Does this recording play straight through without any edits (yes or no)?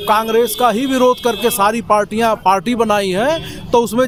yes